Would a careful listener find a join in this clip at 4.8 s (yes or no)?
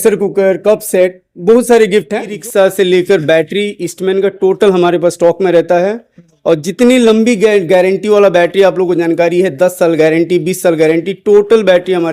no